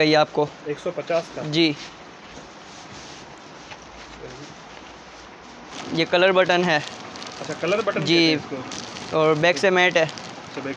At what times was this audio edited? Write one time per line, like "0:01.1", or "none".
0:05.7

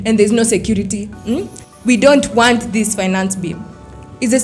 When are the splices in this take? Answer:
0:01.6

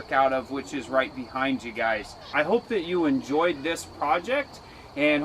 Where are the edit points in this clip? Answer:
0:02.2

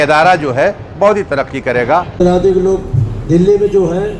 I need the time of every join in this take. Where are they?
0:02.1

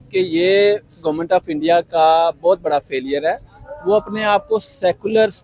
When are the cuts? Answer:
none

